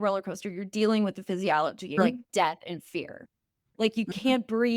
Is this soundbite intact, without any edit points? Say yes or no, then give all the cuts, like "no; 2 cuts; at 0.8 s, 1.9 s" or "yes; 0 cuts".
no; 1 cut; at 2.0 s